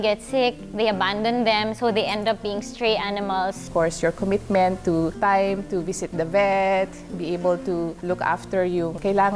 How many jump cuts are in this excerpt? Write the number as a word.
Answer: three